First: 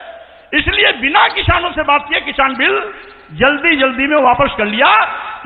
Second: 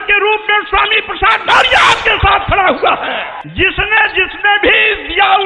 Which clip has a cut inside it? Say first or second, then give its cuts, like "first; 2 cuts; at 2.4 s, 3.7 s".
second; 1 cut; at 3.3 s